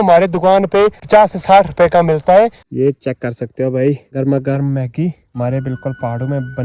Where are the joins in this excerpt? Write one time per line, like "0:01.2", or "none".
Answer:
0:01.0
0:02.6
0:04.1
0:05.2